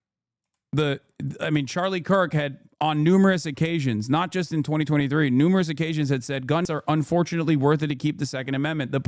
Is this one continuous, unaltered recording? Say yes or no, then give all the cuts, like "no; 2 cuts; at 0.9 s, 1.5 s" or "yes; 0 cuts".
no; 1 cut; at 6.7 s